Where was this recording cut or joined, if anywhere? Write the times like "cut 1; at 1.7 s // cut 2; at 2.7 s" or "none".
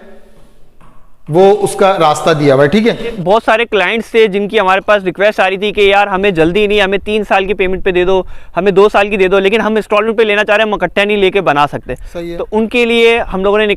cut 1; at 3.2 s